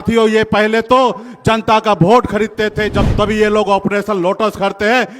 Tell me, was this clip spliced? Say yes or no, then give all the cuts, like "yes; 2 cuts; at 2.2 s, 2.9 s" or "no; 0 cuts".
yes; 1 cut; at 3.0 s